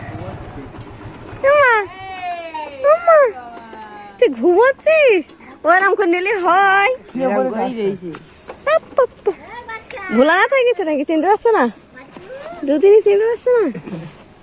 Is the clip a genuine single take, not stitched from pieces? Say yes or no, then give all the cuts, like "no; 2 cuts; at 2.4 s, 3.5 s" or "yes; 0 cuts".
yes; 0 cuts